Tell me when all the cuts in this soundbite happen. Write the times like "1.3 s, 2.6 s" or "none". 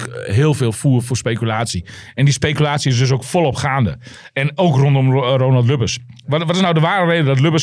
none